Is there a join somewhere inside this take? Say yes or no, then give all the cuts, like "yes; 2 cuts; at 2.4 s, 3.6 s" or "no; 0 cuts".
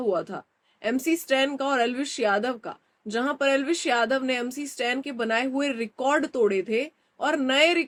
no; 0 cuts